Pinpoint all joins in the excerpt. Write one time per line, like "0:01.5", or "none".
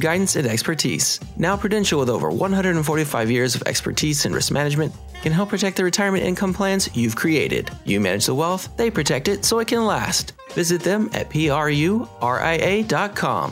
none